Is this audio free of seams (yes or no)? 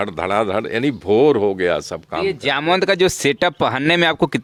yes